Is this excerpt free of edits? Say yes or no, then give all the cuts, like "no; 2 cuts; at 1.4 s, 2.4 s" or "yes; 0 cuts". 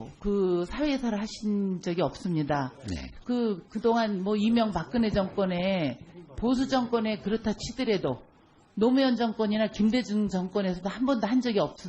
no; 1 cut; at 3.0 s